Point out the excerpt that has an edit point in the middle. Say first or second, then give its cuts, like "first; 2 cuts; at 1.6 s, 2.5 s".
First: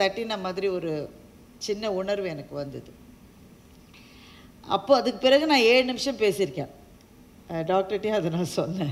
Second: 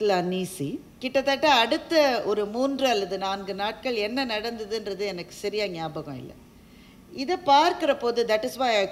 second; 1 cut; at 0.9 s